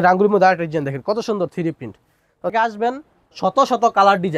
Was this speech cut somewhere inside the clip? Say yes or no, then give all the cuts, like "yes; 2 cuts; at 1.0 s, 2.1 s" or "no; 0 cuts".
yes; 1 cut; at 2.5 s